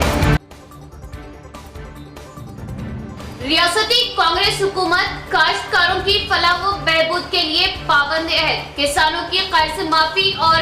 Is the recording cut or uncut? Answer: cut